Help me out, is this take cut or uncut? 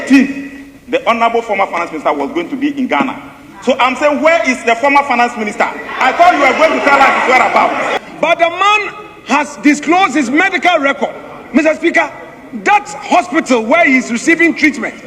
cut